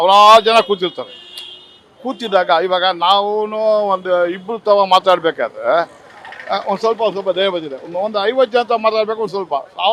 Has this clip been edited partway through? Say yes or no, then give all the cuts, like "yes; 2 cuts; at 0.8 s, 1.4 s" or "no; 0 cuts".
no; 0 cuts